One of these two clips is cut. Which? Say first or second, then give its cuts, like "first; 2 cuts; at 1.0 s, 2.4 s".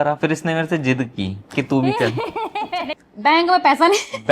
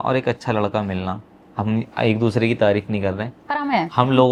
first; 1 cut; at 2.8 s